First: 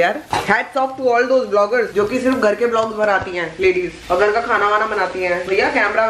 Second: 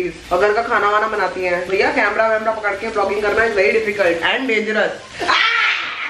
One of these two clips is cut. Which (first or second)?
first